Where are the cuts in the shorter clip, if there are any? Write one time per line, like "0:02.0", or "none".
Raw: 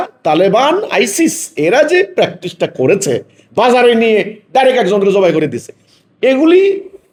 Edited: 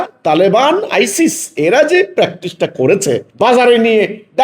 0:03.3